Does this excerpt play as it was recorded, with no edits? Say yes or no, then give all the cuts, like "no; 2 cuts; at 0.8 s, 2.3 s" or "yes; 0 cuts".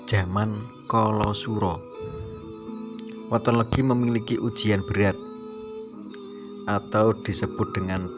no; 4 cuts; at 1.8 s, 3.2 s, 5.1 s, 6.6 s